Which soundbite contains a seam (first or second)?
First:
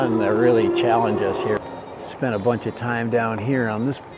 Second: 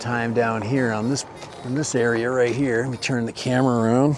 first